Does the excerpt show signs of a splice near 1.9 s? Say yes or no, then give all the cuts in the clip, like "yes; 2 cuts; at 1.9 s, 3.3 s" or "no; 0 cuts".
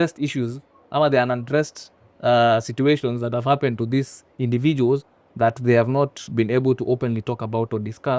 no; 0 cuts